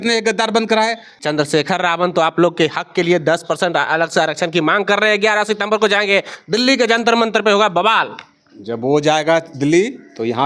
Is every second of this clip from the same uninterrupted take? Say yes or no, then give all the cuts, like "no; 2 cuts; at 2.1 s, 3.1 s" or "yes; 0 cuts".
no; 1 cut; at 1.1 s